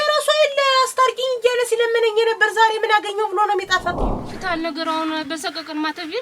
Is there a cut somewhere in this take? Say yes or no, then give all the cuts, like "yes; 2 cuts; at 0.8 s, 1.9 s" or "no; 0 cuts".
yes; 1 cut; at 4.0 s